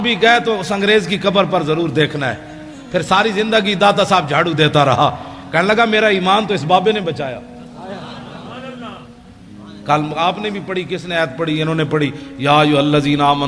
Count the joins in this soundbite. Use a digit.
0